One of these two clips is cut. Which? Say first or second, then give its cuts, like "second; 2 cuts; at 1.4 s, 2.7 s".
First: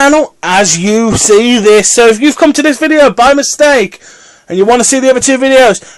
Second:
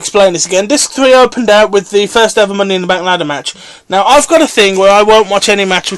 first; 1 cut; at 1.1 s